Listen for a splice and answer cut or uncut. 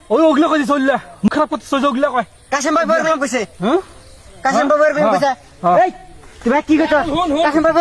cut